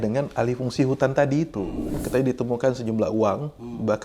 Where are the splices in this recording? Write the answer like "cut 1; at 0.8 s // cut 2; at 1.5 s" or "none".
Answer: cut 1; at 1.7 s